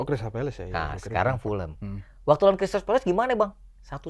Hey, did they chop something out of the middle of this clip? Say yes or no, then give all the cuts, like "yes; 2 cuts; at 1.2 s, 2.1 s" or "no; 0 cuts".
no; 0 cuts